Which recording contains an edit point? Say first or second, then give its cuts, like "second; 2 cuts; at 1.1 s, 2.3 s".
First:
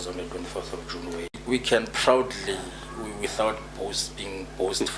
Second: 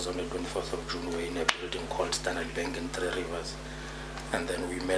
first; 1 cut; at 1.4 s